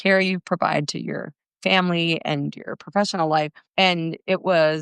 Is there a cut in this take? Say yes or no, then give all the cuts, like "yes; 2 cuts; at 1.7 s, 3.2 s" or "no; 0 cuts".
yes; 1 cut; at 3.6 s